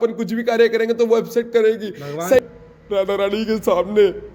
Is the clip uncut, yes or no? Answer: no